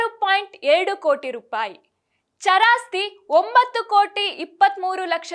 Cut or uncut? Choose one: uncut